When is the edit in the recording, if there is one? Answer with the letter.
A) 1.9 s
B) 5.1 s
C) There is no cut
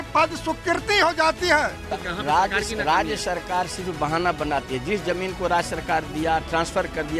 A